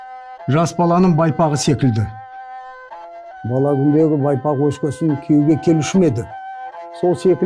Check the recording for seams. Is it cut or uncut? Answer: uncut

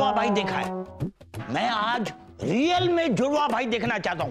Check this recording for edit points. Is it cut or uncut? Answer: uncut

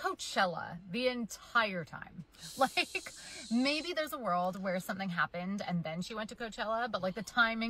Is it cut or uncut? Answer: cut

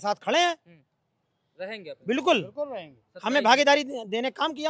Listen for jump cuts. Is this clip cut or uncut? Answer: uncut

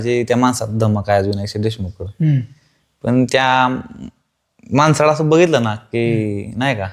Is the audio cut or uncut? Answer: uncut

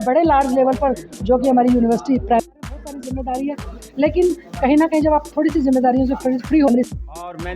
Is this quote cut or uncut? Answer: cut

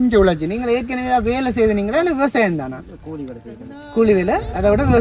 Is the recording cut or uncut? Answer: uncut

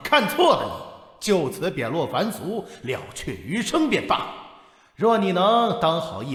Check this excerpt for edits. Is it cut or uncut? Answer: uncut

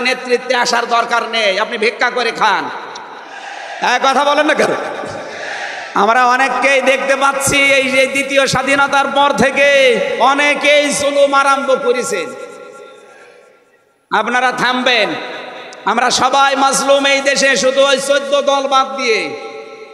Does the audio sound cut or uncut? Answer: uncut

